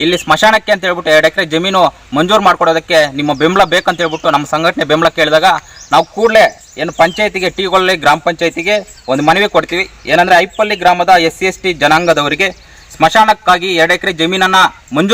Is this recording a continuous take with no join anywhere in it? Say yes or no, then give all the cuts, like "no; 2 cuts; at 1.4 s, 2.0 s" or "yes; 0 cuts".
yes; 0 cuts